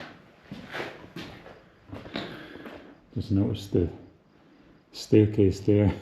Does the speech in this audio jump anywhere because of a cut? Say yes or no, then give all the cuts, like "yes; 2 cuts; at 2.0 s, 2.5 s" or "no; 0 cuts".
yes; 1 cut; at 3.0 s